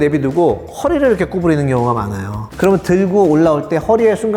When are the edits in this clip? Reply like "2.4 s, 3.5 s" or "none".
none